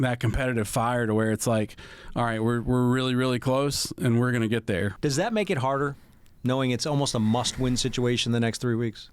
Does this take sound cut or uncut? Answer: cut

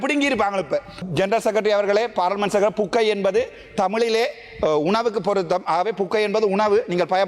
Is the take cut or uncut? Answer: cut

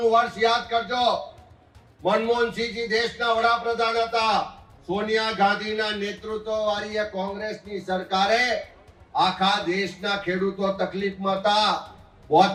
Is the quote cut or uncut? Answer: uncut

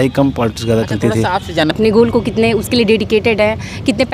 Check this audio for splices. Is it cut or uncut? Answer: cut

